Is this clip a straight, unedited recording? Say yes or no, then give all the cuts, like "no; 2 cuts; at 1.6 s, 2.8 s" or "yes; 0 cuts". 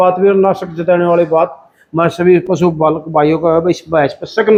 yes; 0 cuts